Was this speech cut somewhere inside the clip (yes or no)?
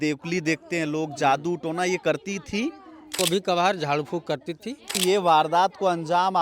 yes